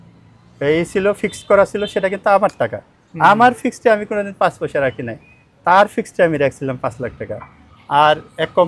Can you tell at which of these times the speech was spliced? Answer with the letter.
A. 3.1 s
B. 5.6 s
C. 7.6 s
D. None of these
D